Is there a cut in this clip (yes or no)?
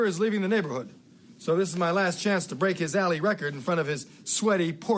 no